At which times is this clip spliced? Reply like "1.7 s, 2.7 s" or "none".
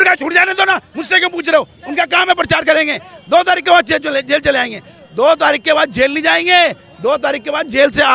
none